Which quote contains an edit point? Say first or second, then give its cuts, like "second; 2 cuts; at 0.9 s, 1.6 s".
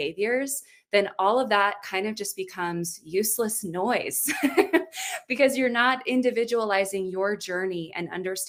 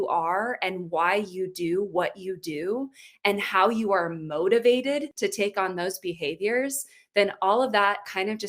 second; 1 cut; at 5.1 s